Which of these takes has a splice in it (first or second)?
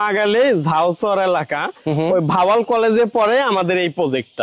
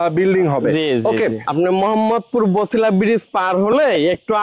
second